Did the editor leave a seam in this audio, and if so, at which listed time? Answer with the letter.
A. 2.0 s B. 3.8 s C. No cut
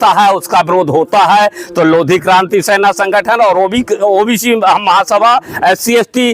C